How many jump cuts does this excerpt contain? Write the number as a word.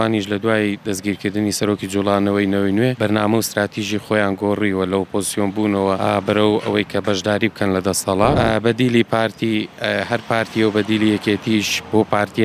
three